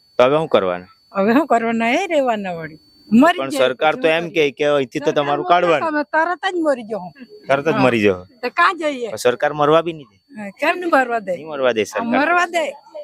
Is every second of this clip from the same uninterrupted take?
yes; 0 cuts

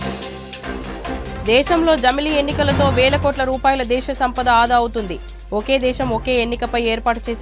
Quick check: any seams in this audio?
yes; 1 cut; at 1.2 s

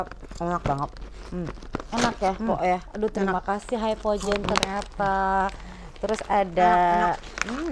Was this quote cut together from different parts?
no; 0 cuts

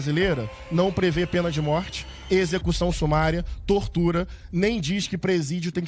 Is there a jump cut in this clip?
no; 0 cuts

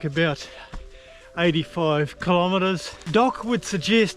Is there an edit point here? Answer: yes; 1 cut; at 2.9 s

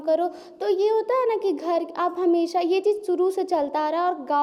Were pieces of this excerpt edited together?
no; 0 cuts

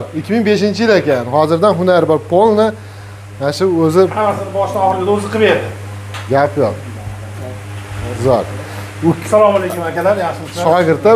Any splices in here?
no; 0 cuts

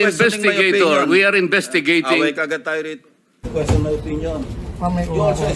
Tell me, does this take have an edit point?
yes; 1 cut; at 3.5 s

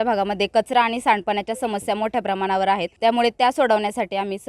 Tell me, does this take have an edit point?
yes; 1 cut; at 2.9 s

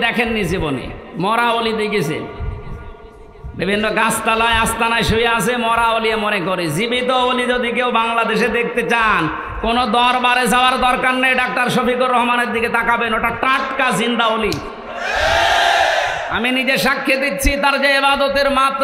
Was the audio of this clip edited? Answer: no; 0 cuts

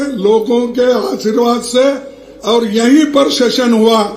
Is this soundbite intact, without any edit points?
yes; 0 cuts

